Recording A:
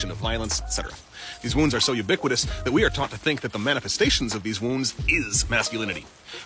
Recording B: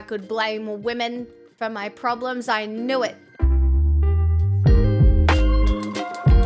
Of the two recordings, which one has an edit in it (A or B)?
B